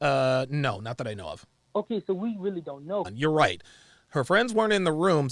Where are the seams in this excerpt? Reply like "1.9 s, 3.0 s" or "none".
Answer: 3.1 s